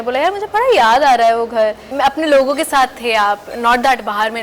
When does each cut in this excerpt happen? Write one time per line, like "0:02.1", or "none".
0:01.8